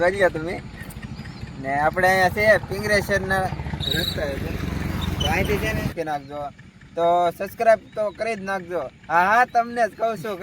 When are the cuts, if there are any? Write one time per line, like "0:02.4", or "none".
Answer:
0:05.9

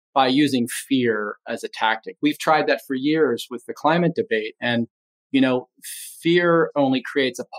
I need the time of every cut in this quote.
0:06.7

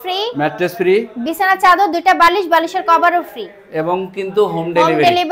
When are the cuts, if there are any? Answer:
none

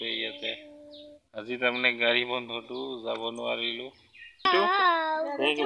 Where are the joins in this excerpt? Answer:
0:04.5

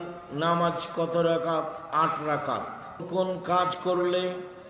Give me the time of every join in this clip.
0:03.0

